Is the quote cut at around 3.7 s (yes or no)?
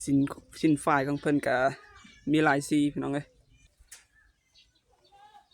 yes